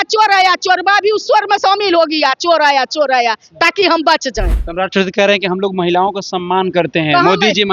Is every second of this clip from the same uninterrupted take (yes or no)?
no